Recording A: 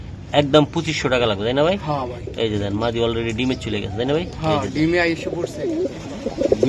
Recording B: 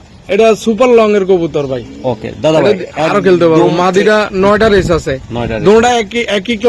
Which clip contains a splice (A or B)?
A